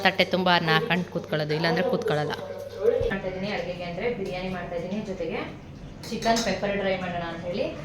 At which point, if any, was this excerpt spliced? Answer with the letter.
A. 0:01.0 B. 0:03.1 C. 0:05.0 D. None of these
B